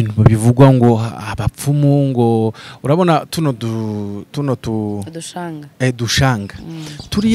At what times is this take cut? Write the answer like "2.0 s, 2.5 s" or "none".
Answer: none